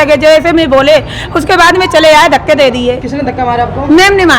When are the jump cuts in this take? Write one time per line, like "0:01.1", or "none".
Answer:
none